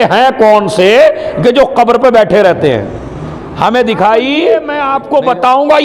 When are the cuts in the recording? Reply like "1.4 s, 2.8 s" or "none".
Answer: 4.7 s